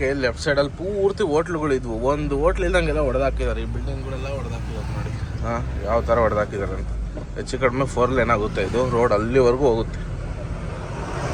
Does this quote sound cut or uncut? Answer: uncut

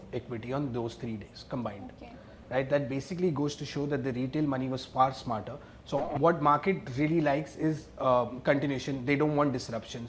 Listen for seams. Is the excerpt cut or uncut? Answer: cut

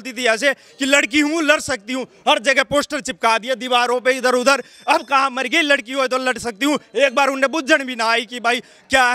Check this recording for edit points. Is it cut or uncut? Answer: uncut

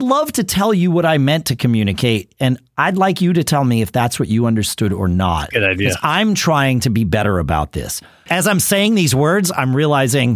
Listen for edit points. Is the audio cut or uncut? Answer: cut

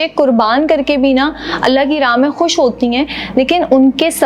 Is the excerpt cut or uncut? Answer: uncut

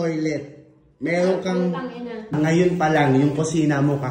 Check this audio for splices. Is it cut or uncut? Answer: cut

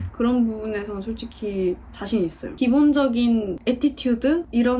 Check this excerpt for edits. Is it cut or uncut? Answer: uncut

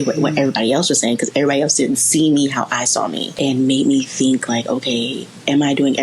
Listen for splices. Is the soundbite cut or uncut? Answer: cut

